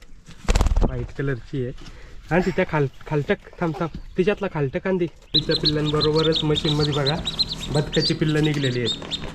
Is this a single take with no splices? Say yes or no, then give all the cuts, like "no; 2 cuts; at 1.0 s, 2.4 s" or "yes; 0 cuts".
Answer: no; 1 cut; at 5.4 s